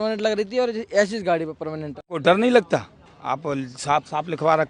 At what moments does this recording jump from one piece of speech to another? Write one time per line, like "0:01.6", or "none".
0:02.1